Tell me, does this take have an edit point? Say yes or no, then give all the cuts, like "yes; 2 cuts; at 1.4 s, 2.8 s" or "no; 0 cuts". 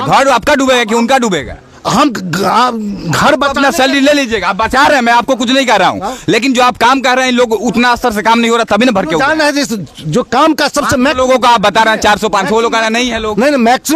no; 0 cuts